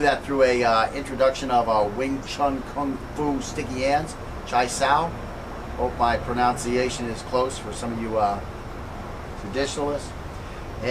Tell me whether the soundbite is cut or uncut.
cut